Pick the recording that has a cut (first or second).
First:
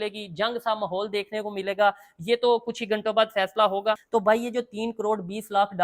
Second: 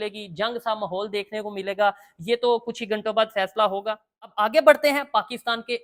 first